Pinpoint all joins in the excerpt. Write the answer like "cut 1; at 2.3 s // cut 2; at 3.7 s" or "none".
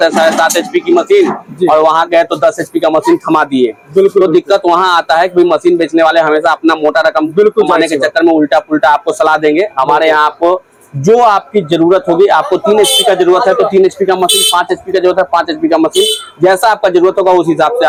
none